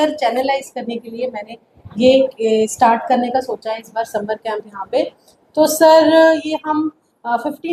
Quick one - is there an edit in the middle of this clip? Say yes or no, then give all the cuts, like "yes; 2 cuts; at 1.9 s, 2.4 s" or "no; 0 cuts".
no; 0 cuts